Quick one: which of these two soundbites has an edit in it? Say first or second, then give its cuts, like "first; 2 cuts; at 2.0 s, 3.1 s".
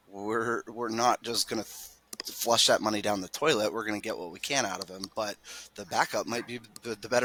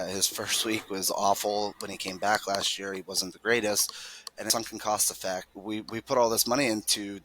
second; 2 cuts; at 4.5 s, 5.5 s